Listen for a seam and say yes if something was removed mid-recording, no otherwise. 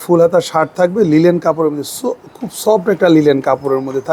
no